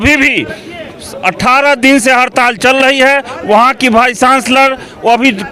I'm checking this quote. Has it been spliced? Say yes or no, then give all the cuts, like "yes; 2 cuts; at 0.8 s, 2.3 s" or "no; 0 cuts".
no; 0 cuts